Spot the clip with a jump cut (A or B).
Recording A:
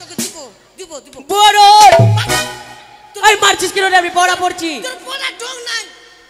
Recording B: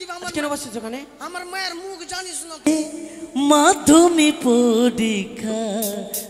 B